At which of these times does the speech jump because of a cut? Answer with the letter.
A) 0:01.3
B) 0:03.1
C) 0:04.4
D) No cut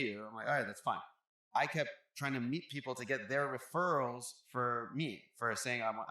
A